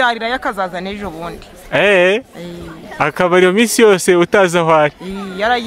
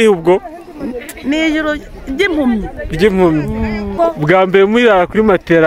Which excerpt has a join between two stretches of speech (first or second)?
second